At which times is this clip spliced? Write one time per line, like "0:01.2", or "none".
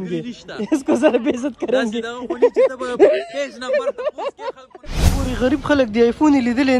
0:05.0